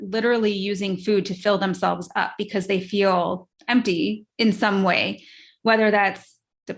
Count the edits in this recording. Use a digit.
1